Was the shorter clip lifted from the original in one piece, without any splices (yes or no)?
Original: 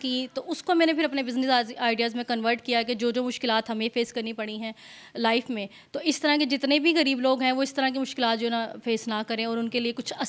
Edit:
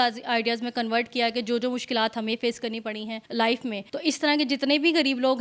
no